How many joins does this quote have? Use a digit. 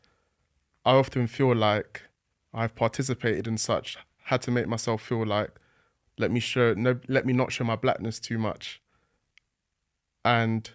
0